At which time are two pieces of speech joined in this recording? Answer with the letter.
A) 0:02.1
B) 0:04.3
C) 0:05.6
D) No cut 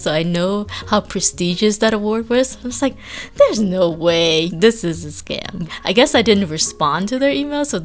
C